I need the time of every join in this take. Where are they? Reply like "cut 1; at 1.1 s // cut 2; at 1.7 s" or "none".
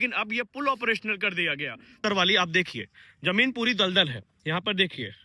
cut 1; at 2.0 s

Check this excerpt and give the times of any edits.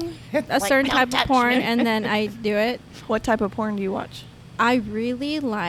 none

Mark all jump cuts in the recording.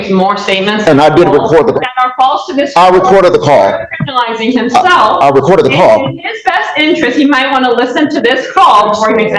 none

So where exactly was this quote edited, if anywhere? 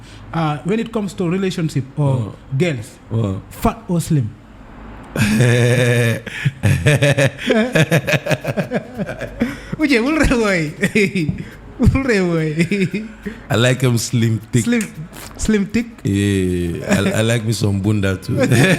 none

